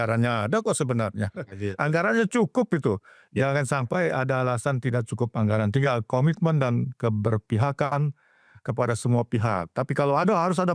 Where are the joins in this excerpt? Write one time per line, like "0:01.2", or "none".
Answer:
none